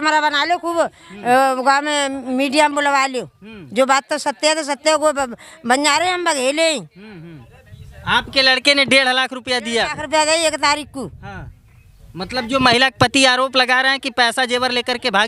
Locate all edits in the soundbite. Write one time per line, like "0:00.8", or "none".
none